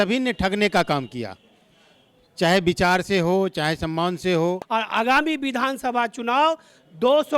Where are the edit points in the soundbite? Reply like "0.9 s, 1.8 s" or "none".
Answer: 4.6 s

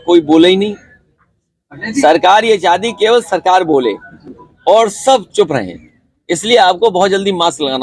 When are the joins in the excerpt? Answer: none

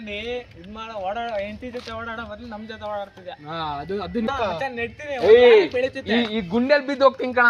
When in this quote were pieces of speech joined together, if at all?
4.3 s

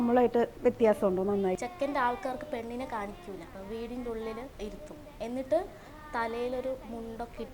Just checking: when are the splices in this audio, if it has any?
1.6 s, 3.6 s, 4.5 s

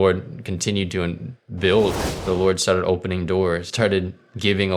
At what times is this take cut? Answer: 2.0 s, 3.7 s

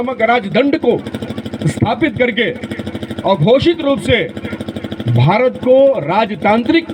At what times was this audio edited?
none

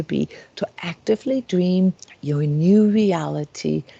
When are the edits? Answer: 2.1 s

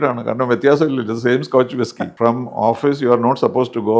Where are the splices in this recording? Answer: 2.1 s

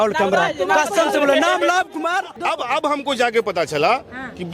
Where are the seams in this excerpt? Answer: 2.4 s

